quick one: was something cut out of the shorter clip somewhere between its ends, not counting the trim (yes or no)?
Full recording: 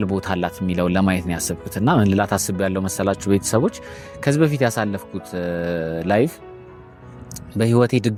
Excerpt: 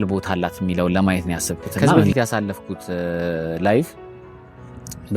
yes